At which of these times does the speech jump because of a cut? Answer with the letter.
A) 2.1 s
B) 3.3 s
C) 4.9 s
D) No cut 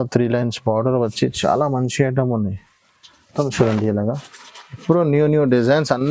B